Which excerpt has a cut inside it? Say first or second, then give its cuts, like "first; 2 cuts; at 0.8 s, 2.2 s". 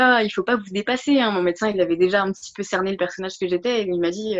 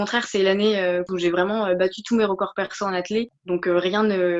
second; 1 cut; at 1.1 s